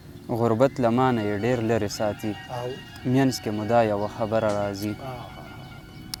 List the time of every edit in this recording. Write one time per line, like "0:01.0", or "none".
none